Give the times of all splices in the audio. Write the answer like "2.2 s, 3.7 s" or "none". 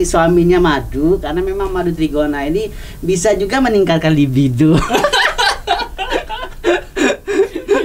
none